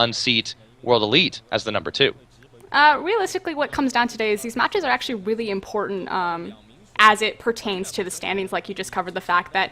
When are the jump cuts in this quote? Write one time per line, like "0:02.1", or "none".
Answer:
0:08.5